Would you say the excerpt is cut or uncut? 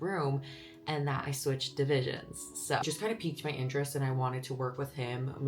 cut